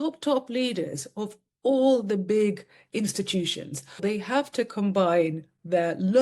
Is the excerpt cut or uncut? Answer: cut